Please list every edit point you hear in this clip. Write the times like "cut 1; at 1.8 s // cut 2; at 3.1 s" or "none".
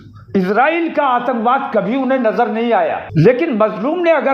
cut 1; at 3.0 s